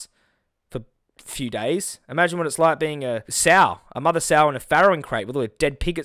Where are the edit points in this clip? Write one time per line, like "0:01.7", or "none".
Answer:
0:03.3